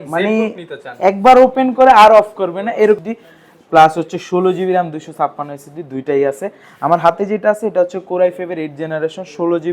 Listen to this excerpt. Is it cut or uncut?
cut